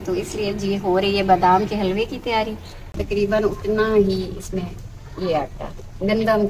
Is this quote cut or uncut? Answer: cut